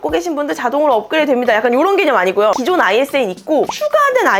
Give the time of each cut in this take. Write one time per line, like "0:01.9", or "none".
none